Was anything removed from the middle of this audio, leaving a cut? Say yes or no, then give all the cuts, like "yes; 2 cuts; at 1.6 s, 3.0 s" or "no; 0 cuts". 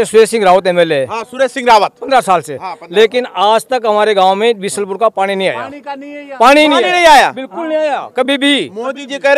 no; 0 cuts